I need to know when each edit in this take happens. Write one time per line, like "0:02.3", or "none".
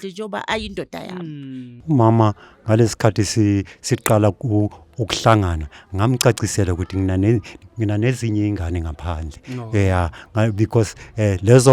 0:01.6

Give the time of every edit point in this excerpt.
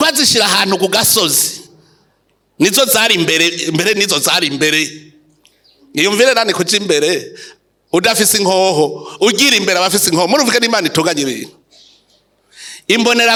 none

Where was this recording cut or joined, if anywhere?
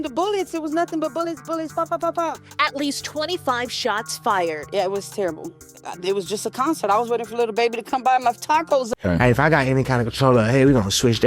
0:09.0

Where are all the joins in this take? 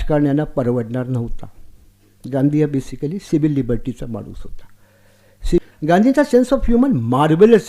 0:05.6

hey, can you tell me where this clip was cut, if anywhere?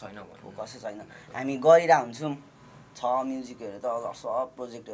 none

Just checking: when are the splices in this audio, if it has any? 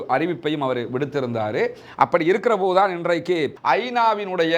0:03.6

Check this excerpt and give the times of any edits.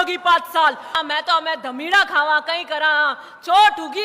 0:01.0

